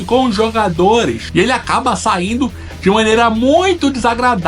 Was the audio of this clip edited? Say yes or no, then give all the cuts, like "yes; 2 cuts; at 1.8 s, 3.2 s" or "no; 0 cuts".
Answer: yes; 1 cut; at 1.2 s